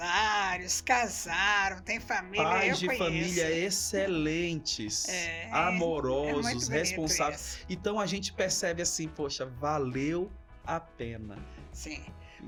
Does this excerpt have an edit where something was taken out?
no; 0 cuts

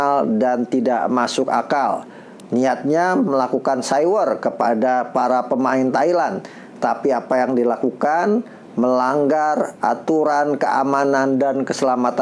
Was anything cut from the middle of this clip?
no; 0 cuts

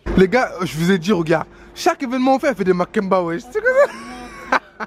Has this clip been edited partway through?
no; 0 cuts

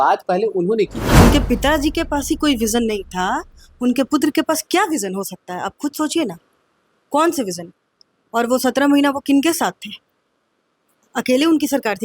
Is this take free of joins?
no; 1 cut; at 1.2 s

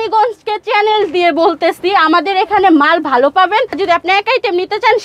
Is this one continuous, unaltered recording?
no; 1 cut; at 3.8 s

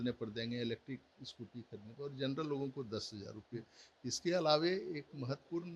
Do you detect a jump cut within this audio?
no; 0 cuts

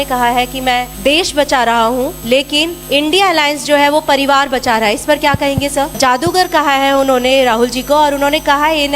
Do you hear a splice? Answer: yes; 3 cuts; at 0.9 s, 2.6 s, 6.0 s

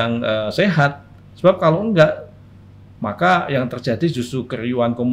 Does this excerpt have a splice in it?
no; 0 cuts

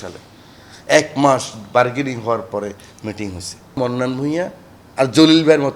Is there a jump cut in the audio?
yes; 1 cut; at 3.8 s

